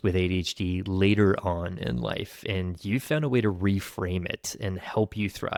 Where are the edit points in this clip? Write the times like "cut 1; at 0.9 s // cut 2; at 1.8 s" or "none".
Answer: none